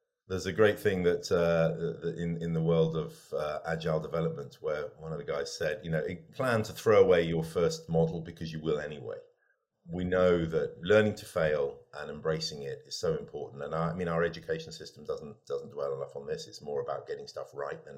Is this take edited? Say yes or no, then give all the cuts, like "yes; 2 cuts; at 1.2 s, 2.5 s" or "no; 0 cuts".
yes; 3 cuts; at 6.3 s, 9.7 s, 10.8 s